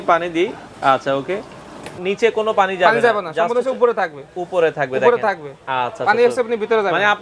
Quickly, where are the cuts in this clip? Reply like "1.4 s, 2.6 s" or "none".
1.9 s